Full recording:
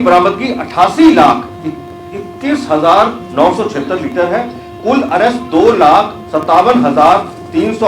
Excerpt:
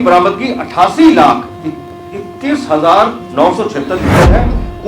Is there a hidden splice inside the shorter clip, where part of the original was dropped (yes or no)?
no